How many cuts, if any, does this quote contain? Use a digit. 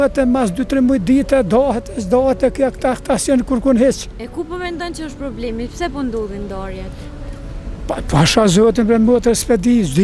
0